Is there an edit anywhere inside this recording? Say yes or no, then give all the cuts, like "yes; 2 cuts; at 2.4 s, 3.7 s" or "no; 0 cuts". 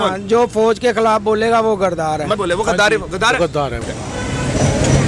yes; 2 cuts; at 2.4 s, 3.9 s